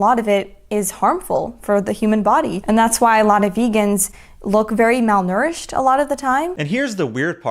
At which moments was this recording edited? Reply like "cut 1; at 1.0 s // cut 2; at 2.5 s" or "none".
cut 1; at 6.6 s